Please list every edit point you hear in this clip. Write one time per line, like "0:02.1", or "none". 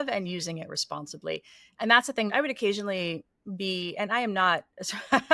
0:02.3